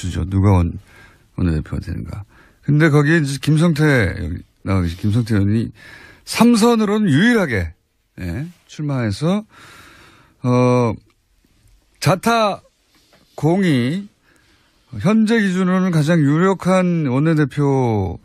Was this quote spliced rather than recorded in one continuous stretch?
no; 0 cuts

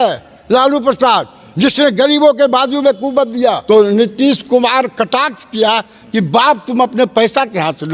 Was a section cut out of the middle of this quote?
yes; 1 cut; at 3.6 s

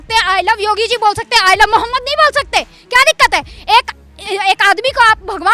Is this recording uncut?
yes; 0 cuts

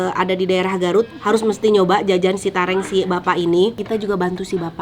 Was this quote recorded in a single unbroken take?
no; 1 cut; at 3.8 s

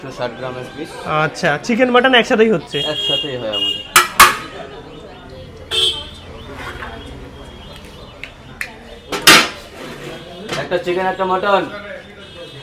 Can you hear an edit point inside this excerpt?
no; 0 cuts

